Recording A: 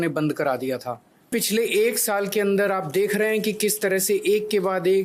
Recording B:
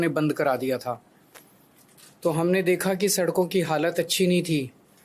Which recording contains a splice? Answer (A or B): A